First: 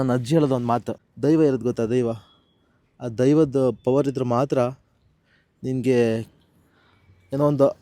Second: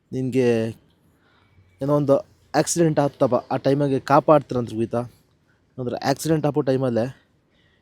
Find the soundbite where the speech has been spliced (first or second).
first